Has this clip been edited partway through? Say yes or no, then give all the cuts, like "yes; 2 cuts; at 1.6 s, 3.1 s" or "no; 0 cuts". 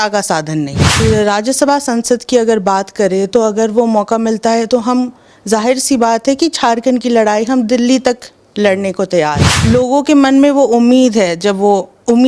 yes; 2 cuts; at 0.9 s, 9.5 s